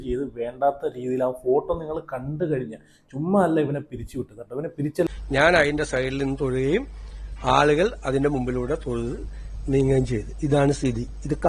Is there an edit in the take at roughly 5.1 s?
yes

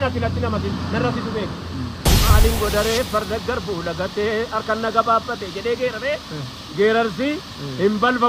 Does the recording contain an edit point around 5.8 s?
no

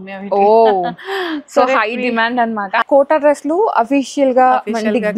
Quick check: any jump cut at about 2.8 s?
yes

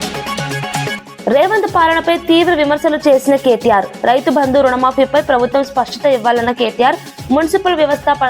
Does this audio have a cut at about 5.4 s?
no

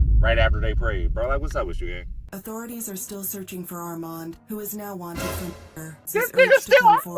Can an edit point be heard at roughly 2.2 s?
yes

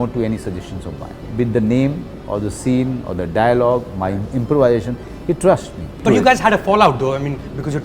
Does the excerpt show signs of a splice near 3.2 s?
no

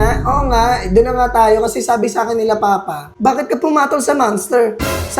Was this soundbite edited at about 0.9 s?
no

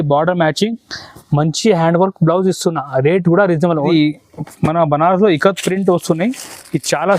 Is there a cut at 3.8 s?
yes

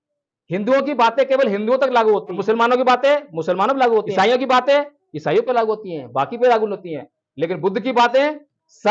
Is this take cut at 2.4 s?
yes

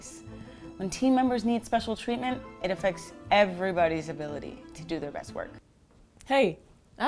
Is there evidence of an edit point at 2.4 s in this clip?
no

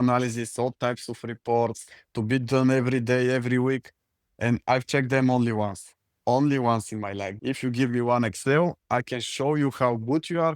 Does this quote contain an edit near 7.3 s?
yes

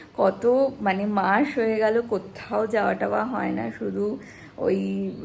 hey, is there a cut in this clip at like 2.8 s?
no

